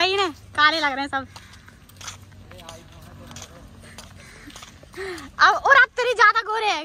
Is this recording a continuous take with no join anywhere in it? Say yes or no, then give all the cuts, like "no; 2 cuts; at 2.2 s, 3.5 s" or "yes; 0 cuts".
yes; 0 cuts